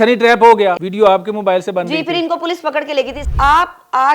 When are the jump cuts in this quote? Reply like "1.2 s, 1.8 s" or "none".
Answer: 0.8 s, 3.2 s